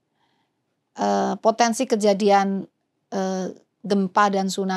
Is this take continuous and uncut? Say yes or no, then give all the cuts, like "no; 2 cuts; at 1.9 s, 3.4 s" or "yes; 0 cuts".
yes; 0 cuts